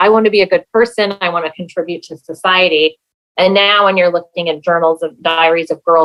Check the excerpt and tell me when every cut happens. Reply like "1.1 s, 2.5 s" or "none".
none